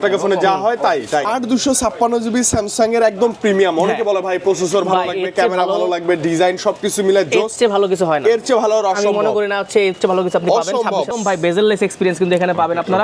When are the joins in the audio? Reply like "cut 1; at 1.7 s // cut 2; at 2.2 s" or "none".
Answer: cut 1; at 1.3 s // cut 2; at 11.1 s